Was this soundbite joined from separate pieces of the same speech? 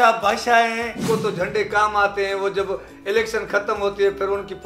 yes; 1 cut; at 1.0 s

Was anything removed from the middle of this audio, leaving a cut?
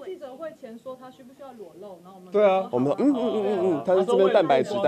no; 0 cuts

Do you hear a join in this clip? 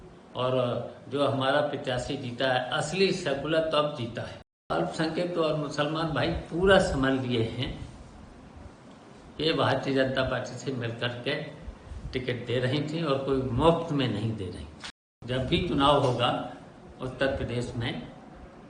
yes; 2 cuts; at 4.7 s, 15.1 s

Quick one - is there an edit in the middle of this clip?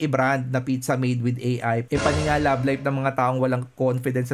yes; 1 cut; at 1.8 s

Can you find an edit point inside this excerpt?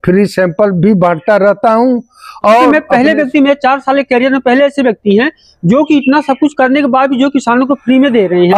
yes; 1 cut; at 2.7 s

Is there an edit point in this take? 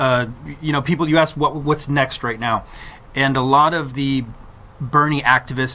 yes; 1 cut; at 3.8 s

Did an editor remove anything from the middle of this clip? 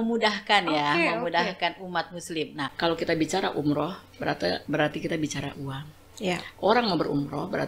yes; 1 cut; at 2.6 s

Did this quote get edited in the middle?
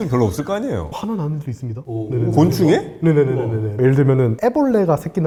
no; 0 cuts

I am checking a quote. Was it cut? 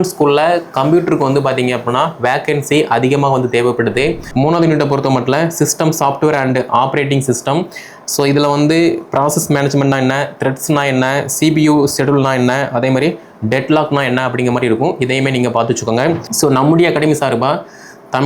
yes; 2 cuts; at 4.3 s, 16.3 s

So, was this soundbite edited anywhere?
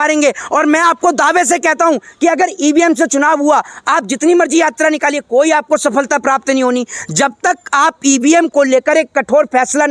no; 0 cuts

